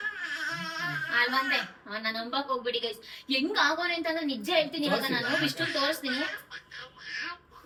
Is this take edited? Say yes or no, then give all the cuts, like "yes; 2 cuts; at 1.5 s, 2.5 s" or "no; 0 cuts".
no; 0 cuts